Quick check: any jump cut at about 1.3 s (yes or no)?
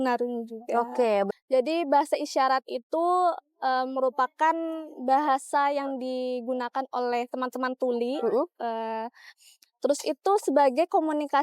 yes